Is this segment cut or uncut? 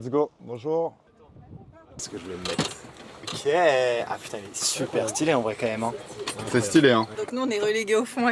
uncut